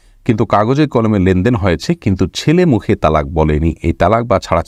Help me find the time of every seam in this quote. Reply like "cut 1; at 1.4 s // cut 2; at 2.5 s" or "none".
none